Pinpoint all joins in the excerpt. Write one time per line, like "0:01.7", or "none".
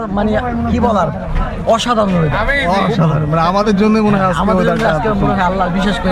none